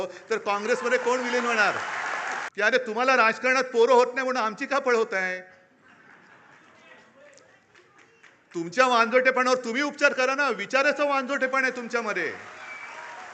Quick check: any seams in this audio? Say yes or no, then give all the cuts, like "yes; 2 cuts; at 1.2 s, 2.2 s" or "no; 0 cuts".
yes; 1 cut; at 2.4 s